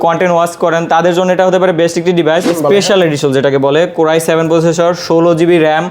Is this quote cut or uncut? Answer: cut